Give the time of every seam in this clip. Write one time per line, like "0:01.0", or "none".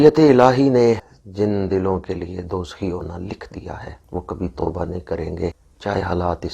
0:01.2
0:03.9
0:05.7